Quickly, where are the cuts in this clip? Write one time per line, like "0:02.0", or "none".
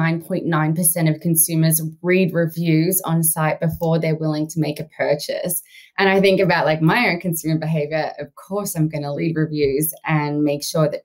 0:09.2